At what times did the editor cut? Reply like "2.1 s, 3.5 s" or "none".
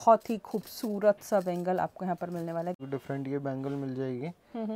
2.8 s